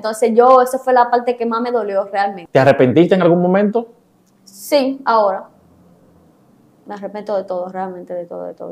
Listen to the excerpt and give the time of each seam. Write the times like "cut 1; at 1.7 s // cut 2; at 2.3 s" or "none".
cut 1; at 2.4 s